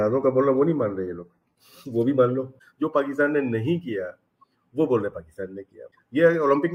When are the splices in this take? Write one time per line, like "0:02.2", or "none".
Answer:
none